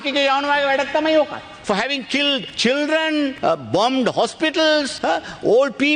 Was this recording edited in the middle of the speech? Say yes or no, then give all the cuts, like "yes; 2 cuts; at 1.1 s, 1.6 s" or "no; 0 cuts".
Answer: yes; 4 cuts; at 1.5 s, 2.5 s, 3.4 s, 4.9 s